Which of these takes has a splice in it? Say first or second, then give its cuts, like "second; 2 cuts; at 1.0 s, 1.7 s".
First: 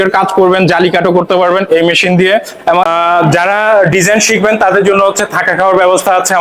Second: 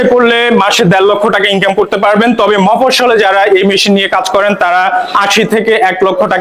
first; 1 cut; at 2.8 s